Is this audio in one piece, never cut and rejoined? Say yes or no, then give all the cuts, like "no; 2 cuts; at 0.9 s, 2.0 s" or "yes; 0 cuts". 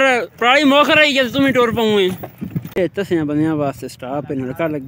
no; 1 cut; at 2.8 s